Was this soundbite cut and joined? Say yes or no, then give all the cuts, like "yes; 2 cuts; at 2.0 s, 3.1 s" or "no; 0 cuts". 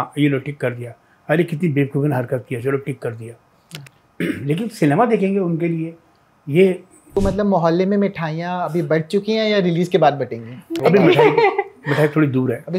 yes; 2 cuts; at 6.9 s, 10.8 s